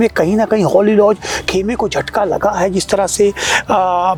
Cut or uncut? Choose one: uncut